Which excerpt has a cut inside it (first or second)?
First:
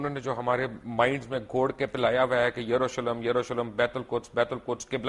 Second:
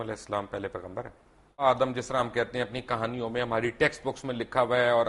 second